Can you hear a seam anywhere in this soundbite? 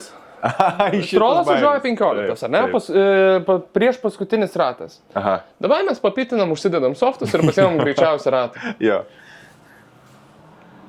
no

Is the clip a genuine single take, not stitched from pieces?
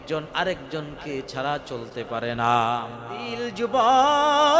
no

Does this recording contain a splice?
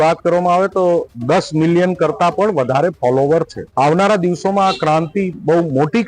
yes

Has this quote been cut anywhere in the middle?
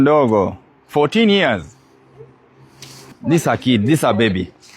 yes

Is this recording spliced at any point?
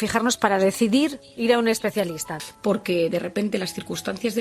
yes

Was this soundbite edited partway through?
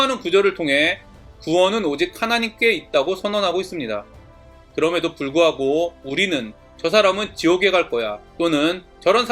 no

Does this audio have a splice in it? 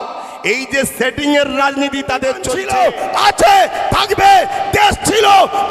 yes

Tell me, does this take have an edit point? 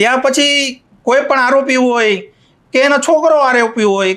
no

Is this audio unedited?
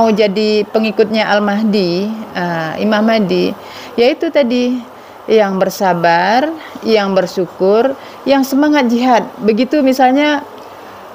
yes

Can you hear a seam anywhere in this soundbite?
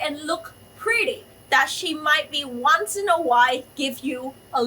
yes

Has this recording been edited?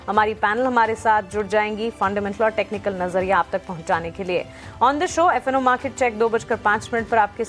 no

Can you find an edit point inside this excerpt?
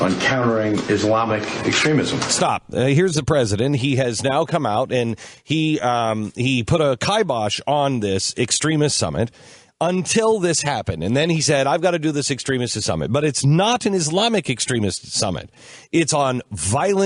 no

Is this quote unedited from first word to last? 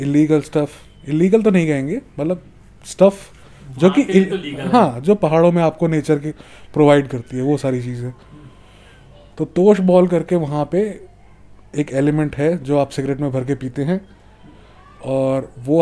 yes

